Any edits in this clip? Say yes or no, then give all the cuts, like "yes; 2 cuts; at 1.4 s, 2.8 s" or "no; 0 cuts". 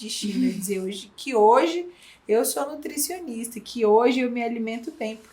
no; 0 cuts